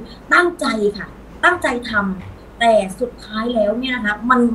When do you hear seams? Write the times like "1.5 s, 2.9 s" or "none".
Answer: none